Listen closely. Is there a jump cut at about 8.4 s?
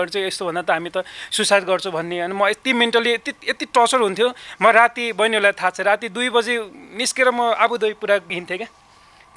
yes; 1 cut; at 8.4 s

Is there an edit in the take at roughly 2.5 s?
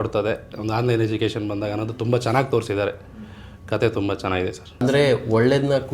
no; 1 cut; at 4.8 s

